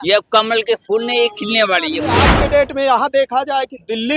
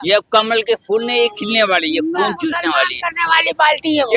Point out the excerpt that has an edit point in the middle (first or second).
first